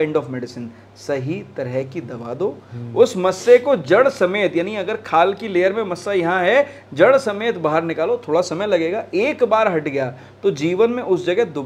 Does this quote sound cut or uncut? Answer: uncut